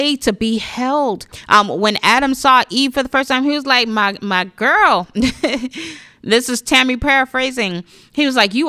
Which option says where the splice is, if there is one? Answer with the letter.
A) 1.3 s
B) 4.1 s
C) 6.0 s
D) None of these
A